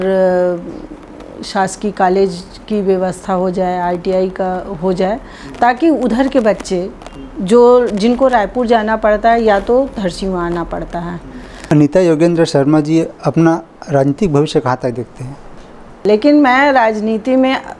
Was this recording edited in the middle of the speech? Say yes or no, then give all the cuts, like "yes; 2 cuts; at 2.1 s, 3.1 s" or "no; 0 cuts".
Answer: yes; 2 cuts; at 11.7 s, 16.0 s